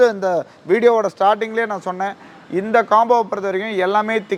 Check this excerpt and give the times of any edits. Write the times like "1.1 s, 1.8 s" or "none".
none